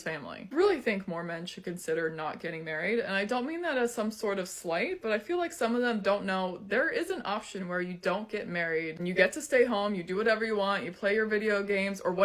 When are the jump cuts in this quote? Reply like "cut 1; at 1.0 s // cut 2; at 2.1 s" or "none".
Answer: cut 1; at 1.2 s // cut 2; at 5.9 s